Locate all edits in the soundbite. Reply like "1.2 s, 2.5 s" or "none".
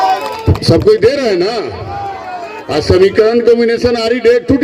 none

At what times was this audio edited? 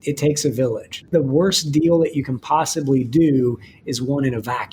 1.1 s

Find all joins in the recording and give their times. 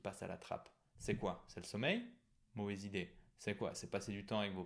none

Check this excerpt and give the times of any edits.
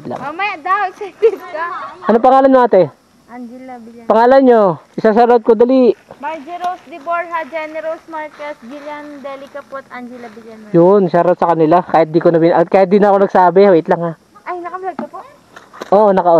none

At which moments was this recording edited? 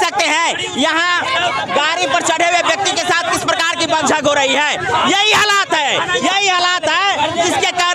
none

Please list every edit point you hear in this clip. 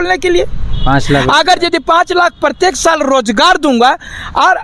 none

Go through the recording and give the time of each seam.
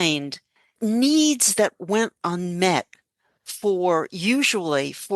0.8 s, 1.8 s

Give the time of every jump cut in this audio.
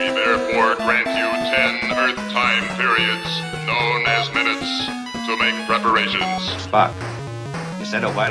none

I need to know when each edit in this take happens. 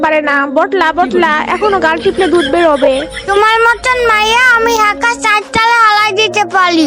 none

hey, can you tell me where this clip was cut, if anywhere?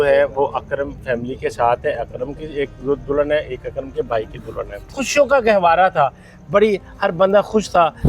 5.0 s

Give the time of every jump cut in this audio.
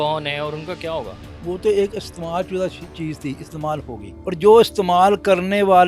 1.2 s, 4.1 s

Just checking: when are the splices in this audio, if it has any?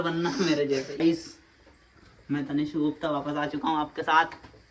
1.0 s

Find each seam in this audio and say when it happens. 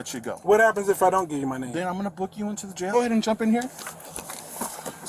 2.9 s

